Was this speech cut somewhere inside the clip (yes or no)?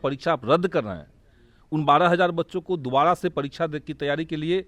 no